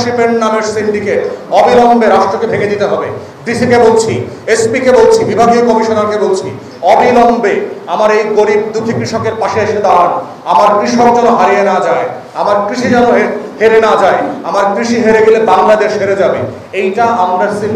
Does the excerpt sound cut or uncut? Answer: uncut